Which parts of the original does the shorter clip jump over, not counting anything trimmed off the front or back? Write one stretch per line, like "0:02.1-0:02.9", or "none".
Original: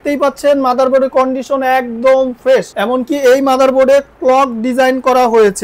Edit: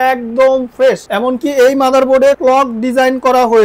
0:04.0-0:04.2